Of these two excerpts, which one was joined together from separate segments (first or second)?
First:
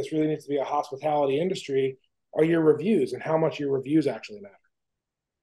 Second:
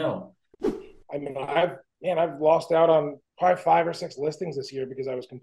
second